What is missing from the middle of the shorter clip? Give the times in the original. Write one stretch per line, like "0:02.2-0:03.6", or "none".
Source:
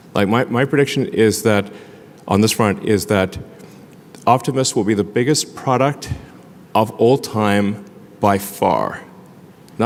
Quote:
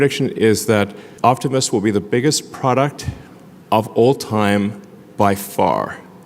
0:01.8-0:04.1